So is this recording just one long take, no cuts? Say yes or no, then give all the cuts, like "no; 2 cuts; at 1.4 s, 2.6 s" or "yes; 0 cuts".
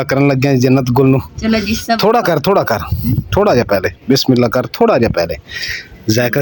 yes; 0 cuts